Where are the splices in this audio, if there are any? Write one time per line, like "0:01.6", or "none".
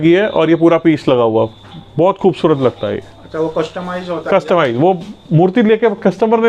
none